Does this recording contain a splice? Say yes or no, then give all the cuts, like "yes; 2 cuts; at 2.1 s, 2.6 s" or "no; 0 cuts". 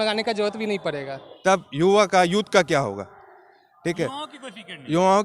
yes; 1 cut; at 1.3 s